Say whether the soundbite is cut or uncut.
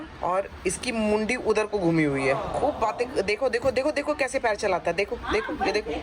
cut